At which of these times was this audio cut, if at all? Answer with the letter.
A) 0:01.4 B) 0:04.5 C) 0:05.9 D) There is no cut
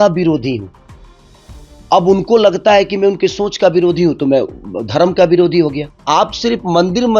C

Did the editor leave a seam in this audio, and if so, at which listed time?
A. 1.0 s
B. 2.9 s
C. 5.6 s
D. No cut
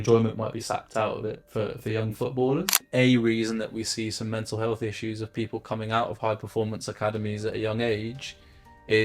B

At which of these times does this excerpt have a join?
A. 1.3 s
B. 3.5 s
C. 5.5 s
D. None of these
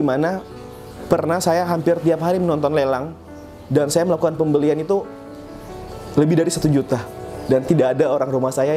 D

